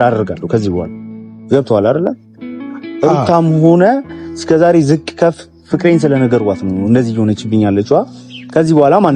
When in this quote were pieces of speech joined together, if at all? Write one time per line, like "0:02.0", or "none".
none